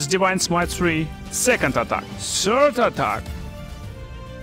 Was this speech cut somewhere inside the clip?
no; 0 cuts

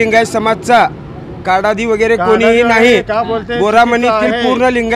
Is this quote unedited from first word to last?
yes; 0 cuts

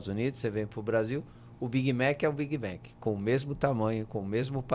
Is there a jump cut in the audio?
no; 0 cuts

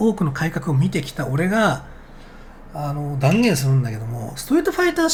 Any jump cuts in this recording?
no; 0 cuts

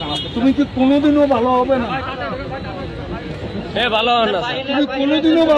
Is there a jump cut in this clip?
no; 0 cuts

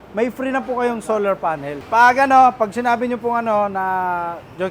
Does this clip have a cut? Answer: yes; 1 cut; at 1.7 s

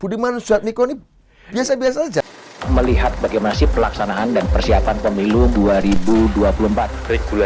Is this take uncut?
no; 1 cut; at 2.2 s

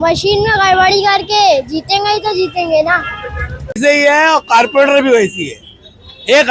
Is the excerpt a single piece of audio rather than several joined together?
no; 1 cut; at 3.7 s

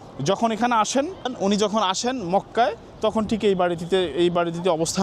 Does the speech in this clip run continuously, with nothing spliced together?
no; 1 cut; at 1.3 s

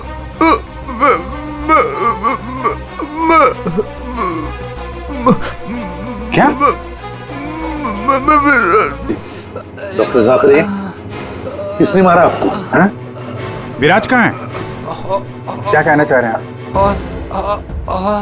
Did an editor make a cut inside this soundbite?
yes; 1 cut; at 9.1 s

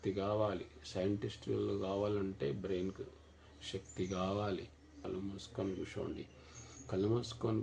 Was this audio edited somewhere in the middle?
yes; 1 cut; at 5.0 s

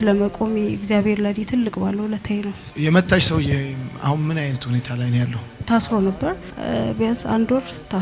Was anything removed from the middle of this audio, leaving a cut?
yes; 2 cuts; at 2.6 s, 5.5 s

